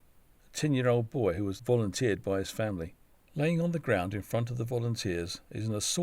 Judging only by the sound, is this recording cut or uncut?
cut